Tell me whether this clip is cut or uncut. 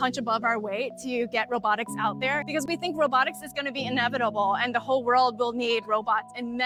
uncut